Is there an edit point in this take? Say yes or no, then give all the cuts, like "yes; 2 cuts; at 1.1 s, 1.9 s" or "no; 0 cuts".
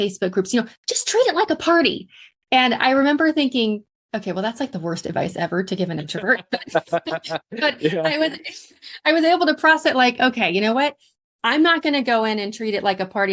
yes; 1 cut; at 3.9 s